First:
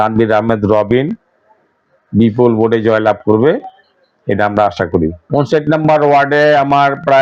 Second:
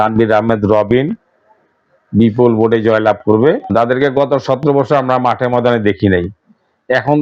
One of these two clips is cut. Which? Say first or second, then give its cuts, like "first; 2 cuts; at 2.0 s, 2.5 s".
second; 1 cut; at 3.6 s